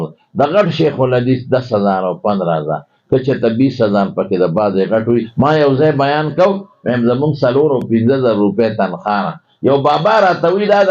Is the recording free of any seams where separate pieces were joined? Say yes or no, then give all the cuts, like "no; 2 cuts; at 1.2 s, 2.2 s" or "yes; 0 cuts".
no; 1 cut; at 5.3 s